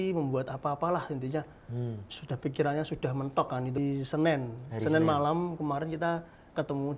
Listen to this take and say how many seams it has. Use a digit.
1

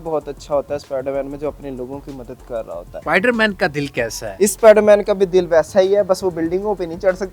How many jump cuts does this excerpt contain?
2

